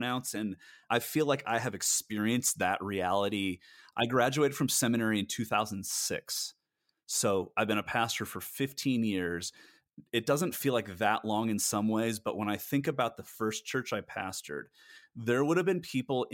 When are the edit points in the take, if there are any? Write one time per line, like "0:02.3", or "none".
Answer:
none